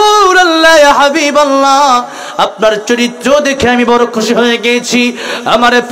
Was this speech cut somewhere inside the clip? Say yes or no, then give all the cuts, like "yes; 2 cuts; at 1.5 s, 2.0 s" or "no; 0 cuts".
no; 0 cuts